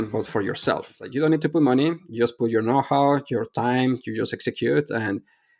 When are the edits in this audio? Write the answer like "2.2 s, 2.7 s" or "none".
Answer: 1.0 s